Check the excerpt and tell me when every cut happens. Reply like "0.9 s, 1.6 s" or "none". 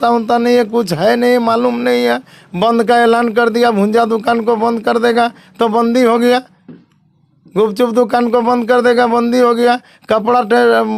none

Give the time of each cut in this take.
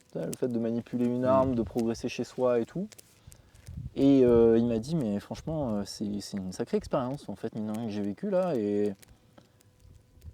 none

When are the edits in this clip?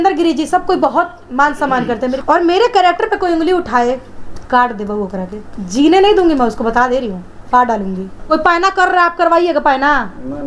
2.2 s, 8.1 s

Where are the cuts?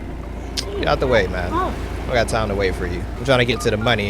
3.1 s

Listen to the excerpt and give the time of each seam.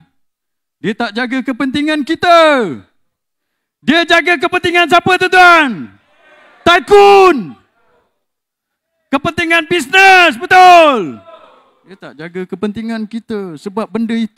none

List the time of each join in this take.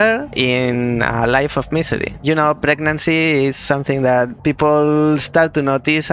2.1 s, 4.3 s

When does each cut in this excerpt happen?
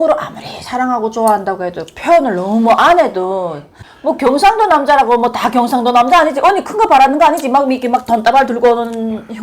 3.8 s

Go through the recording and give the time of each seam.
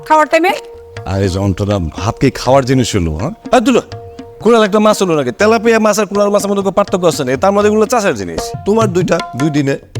3.3 s, 8.5 s

